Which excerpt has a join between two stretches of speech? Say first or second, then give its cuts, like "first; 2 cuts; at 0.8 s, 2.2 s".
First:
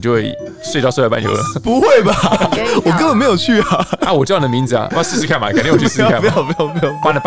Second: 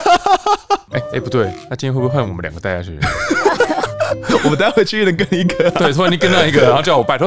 second; 2 cuts; at 0.9 s, 1.6 s